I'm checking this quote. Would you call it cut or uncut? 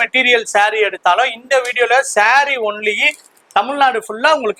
uncut